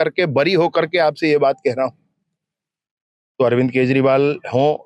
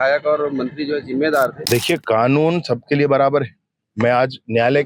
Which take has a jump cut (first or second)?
second